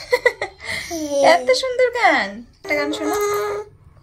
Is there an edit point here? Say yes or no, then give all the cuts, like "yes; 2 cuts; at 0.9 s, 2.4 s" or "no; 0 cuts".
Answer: yes; 1 cut; at 2.6 s